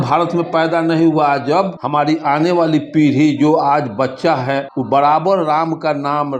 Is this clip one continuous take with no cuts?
no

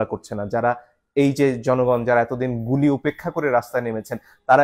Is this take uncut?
yes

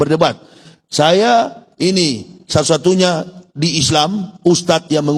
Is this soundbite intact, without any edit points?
yes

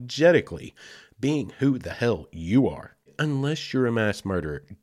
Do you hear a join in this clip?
yes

